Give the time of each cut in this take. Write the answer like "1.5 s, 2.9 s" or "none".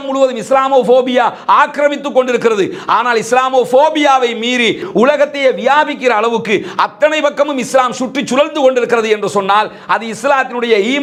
none